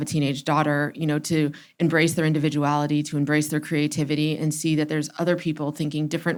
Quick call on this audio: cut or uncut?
uncut